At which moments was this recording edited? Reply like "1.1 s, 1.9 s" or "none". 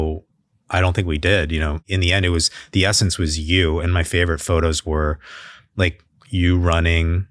1.8 s